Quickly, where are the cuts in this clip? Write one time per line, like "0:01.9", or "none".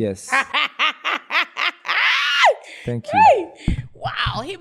none